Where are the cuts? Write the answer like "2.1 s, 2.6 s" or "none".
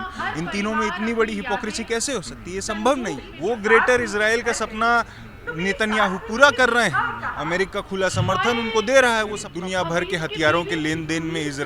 3.3 s, 9.5 s